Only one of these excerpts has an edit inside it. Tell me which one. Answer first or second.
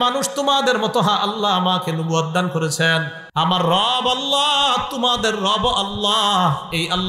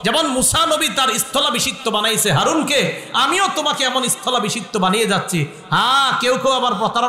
first